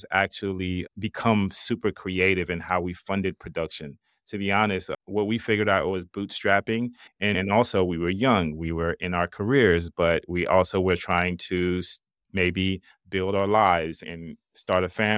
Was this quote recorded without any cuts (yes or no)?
yes